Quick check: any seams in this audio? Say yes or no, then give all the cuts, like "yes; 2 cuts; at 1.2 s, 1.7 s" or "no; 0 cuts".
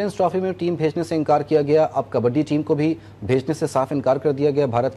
no; 0 cuts